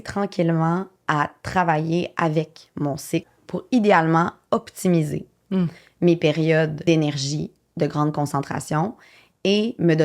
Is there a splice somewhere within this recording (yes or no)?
yes